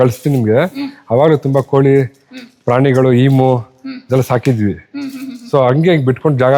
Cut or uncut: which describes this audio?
uncut